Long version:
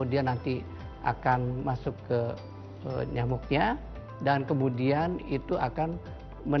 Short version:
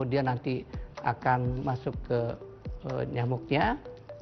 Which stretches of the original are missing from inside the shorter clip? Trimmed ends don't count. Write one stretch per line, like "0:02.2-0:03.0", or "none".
none